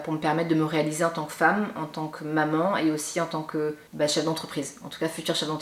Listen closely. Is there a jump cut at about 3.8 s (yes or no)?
yes